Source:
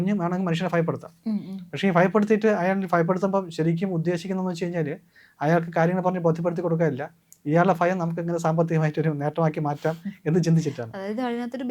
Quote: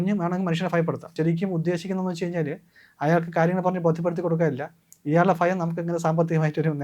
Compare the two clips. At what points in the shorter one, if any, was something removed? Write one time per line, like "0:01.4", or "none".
0:01.1